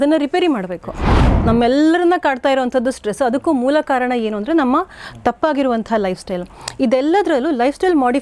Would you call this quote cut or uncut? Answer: cut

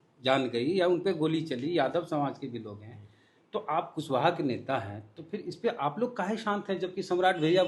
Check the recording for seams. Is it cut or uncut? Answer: uncut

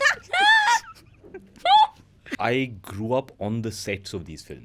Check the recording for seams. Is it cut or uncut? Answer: cut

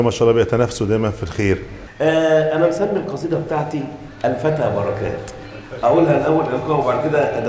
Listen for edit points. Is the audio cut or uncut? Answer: cut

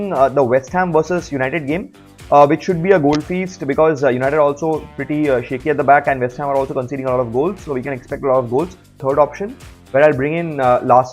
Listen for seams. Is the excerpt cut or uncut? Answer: cut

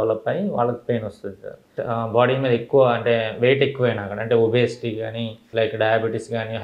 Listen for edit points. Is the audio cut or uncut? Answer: cut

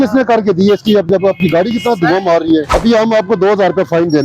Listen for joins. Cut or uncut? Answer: cut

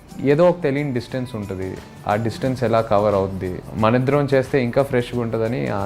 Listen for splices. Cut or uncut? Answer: cut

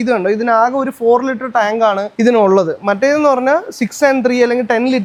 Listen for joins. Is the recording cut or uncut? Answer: uncut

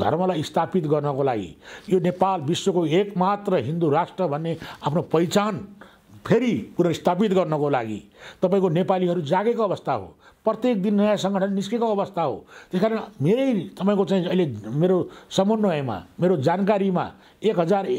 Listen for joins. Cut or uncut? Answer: uncut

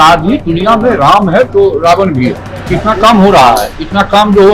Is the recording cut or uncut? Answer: cut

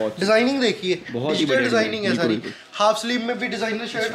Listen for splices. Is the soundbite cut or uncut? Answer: uncut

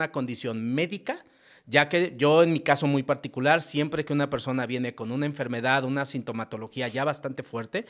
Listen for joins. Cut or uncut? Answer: uncut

